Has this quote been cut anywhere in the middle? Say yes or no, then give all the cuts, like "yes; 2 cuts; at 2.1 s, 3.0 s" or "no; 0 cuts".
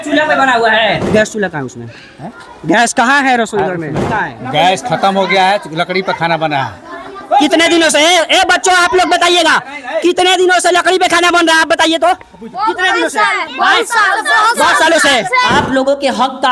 yes; 3 cuts; at 1.0 s, 4.0 s, 15.5 s